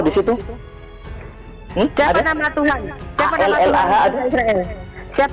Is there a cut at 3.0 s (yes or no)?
yes